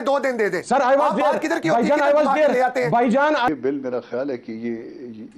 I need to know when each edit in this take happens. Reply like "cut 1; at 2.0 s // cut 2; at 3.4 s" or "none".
cut 1; at 3.5 s